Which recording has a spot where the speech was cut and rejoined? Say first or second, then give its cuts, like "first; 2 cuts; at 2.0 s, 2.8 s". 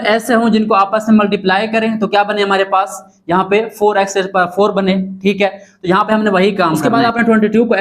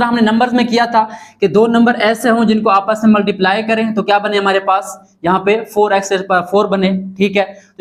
first; 1 cut; at 6.8 s